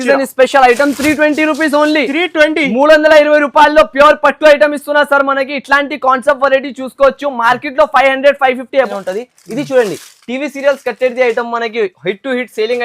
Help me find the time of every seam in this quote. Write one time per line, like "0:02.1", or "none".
0:08.9